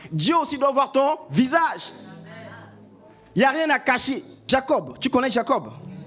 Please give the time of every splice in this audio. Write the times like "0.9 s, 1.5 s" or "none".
4.5 s